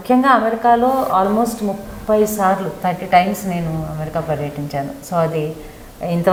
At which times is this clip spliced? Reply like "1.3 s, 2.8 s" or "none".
none